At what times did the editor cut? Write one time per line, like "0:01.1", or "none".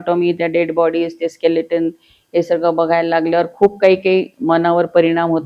none